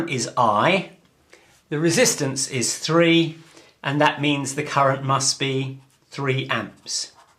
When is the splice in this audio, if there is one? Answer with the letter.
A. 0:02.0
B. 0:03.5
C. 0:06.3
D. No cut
C